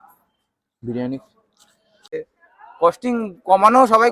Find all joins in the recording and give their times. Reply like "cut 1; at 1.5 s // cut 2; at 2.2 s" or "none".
cut 1; at 2.1 s

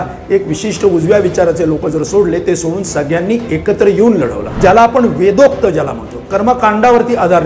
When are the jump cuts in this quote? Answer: cut 1; at 4.5 s

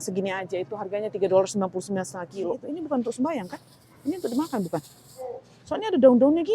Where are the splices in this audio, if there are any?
cut 1; at 2.7 s

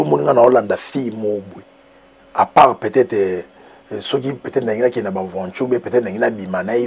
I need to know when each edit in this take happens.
none

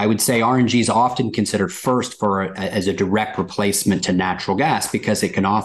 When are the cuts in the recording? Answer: none

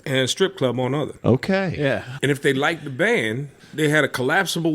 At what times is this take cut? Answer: cut 1; at 2.1 s // cut 2; at 3.6 s

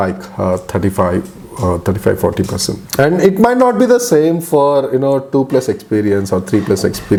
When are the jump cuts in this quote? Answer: none

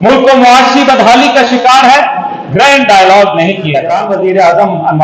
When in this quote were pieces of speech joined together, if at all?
cut 1; at 4.0 s

